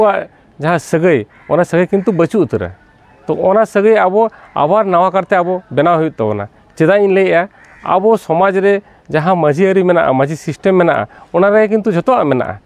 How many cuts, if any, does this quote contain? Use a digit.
0